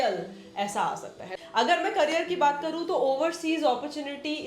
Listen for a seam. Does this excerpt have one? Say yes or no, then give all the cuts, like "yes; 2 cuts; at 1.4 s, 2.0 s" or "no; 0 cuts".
yes; 1 cut; at 1.2 s